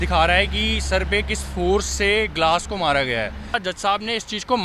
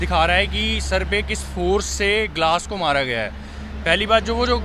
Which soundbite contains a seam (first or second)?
first